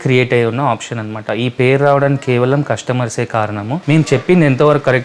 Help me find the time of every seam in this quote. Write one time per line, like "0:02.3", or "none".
0:03.8